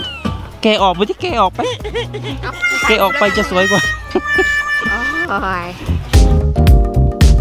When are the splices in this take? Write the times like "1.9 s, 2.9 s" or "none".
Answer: none